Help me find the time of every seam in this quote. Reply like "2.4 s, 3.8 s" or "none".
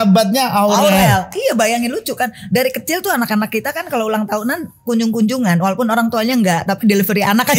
none